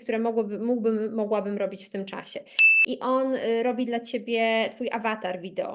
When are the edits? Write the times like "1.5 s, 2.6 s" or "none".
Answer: 2.6 s